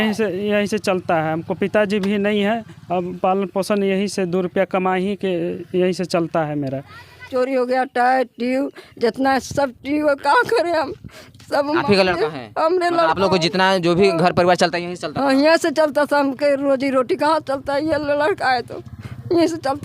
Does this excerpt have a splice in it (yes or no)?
yes